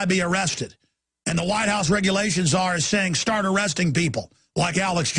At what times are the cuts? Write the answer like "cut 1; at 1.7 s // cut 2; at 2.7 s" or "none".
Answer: cut 1; at 3.4 s